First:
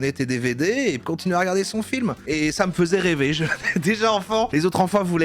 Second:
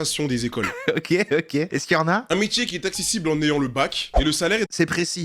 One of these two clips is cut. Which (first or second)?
first